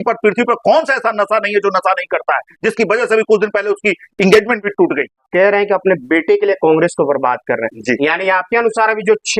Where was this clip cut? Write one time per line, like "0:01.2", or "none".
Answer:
0:05.2